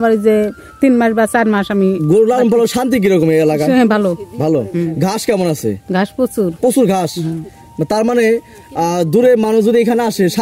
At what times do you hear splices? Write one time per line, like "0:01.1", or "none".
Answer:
none